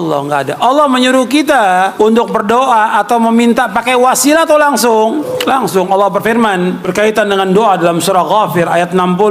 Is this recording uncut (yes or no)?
no